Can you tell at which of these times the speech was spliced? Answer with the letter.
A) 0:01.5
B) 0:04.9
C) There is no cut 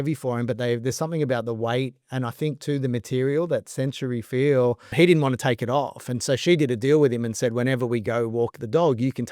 B